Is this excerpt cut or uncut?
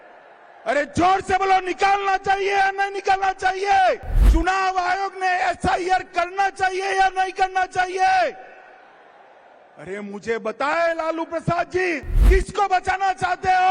cut